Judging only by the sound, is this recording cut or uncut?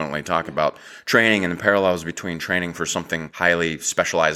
cut